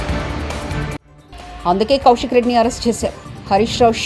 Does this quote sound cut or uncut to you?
cut